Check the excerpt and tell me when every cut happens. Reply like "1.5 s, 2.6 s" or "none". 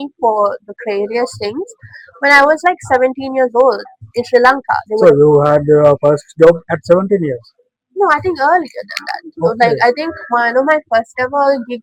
none